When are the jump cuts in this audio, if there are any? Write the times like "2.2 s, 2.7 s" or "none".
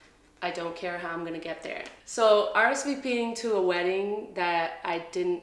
1.9 s